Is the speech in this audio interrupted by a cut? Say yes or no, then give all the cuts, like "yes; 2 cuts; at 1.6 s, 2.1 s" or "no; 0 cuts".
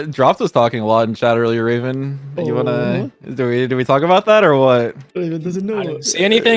no; 0 cuts